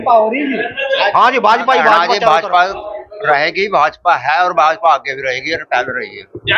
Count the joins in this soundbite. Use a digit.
1